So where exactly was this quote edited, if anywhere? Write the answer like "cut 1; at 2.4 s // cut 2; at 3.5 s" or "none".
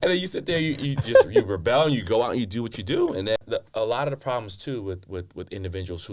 cut 1; at 3.4 s